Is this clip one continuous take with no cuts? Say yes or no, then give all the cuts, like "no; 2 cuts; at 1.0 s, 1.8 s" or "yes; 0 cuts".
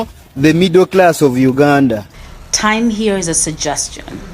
no; 1 cut; at 2.1 s